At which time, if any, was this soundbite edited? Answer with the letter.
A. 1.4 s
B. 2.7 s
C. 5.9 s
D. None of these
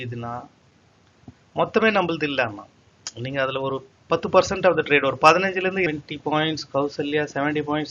C